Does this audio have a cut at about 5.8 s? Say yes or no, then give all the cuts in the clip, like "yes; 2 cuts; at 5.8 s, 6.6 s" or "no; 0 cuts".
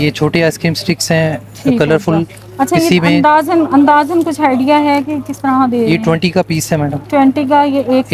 no; 0 cuts